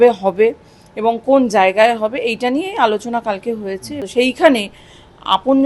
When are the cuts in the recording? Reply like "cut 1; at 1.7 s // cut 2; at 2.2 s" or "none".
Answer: cut 1; at 4.0 s